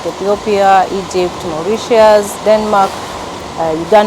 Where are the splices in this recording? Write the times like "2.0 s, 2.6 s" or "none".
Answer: 2.4 s